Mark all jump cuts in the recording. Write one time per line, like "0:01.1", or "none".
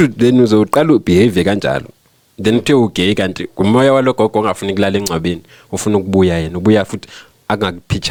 none